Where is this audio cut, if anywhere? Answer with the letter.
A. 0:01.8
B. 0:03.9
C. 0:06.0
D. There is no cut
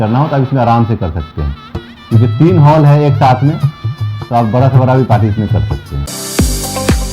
C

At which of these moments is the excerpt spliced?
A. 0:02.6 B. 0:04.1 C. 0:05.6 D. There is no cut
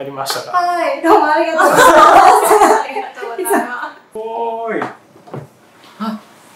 B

